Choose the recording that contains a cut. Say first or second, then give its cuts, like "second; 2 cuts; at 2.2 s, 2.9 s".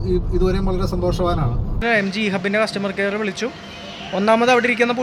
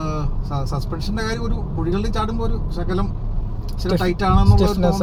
first; 1 cut; at 1.8 s